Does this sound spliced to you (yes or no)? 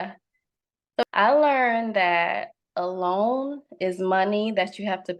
yes